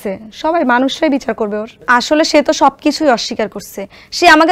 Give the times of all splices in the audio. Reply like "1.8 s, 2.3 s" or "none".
none